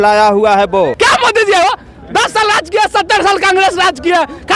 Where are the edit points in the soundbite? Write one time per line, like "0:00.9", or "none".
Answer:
0:00.9